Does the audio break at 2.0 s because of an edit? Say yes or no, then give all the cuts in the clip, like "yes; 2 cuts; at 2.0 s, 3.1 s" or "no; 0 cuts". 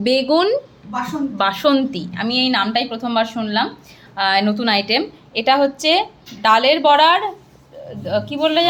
no; 0 cuts